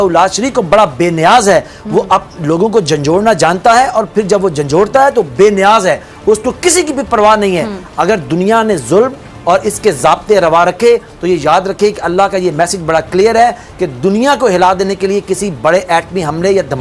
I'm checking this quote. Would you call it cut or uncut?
uncut